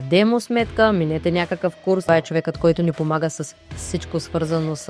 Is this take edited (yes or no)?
yes